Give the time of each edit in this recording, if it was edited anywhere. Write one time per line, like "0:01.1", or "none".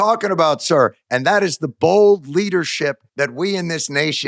0:03.0